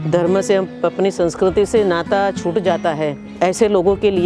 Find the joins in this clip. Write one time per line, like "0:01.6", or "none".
0:03.4